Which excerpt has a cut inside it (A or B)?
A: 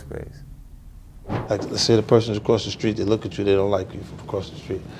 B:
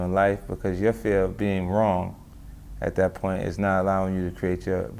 A